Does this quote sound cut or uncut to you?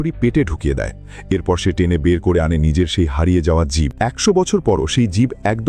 cut